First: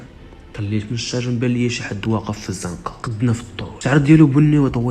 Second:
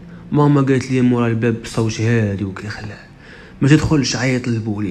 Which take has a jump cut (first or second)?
first